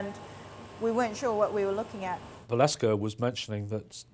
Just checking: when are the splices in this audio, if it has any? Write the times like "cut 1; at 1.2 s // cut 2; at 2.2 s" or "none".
cut 1; at 2.3 s